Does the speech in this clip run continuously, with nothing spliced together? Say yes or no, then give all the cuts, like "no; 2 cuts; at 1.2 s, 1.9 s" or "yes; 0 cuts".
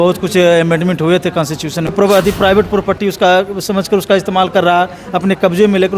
no; 1 cut; at 1.9 s